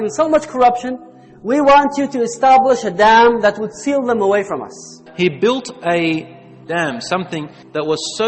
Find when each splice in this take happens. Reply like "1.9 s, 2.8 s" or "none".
5.0 s, 6.6 s